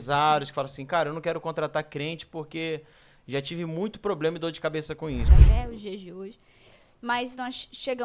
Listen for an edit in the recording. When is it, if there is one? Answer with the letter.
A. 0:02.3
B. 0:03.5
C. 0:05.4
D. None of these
C